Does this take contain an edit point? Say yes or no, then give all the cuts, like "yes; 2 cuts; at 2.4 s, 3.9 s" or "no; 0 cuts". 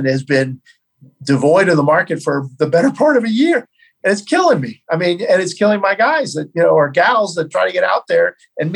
no; 0 cuts